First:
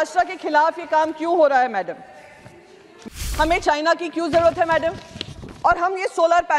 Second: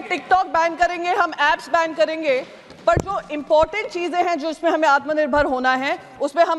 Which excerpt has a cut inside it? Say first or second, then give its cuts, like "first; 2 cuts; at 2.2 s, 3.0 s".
first; 1 cut; at 3.2 s